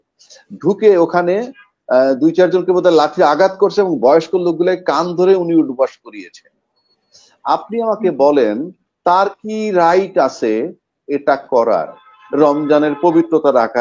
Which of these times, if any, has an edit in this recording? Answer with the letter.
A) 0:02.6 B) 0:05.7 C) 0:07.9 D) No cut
D